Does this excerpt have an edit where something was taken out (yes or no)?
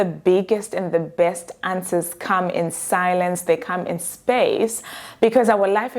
no